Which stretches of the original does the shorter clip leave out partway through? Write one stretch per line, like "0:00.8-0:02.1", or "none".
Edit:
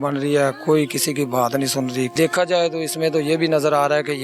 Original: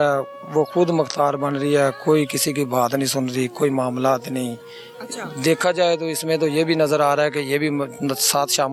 0:03.5-0:05.4